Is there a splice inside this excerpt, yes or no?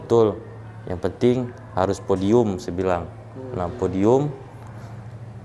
no